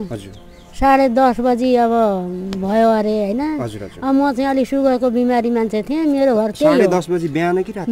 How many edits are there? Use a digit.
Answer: 0